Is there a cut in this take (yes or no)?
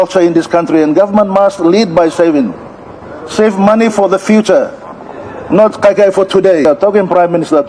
yes